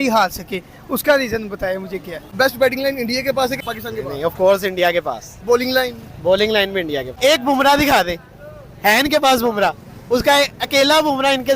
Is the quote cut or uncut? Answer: cut